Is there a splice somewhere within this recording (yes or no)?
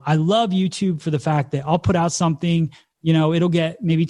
no